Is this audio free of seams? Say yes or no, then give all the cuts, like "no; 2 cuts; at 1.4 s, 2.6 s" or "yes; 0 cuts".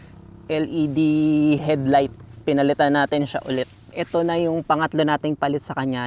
no; 2 cuts; at 1.6 s, 3.8 s